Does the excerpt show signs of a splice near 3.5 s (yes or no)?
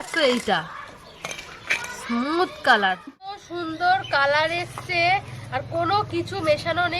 yes